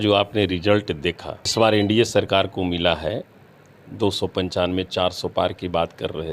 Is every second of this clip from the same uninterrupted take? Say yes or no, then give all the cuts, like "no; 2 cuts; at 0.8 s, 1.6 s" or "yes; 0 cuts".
no; 1 cut; at 1.5 s